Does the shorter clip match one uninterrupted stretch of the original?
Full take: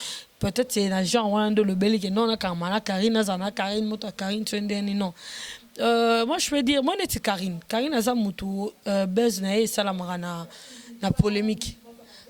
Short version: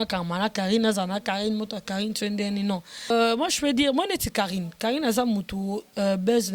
no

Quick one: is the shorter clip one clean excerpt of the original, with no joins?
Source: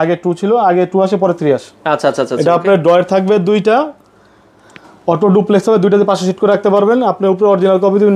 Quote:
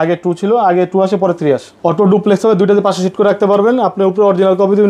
no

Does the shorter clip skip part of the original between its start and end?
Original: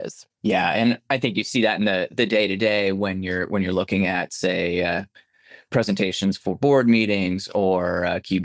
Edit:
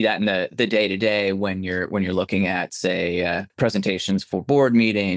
yes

